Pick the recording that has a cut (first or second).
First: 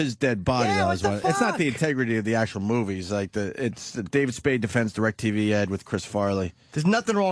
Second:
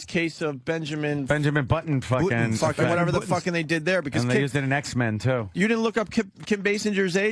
second